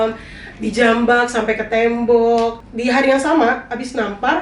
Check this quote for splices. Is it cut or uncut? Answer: cut